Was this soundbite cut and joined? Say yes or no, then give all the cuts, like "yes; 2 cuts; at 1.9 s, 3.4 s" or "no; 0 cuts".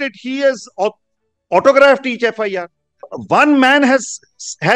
yes; 1 cut; at 3.1 s